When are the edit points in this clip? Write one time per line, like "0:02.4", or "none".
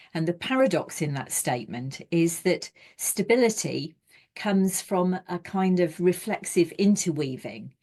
none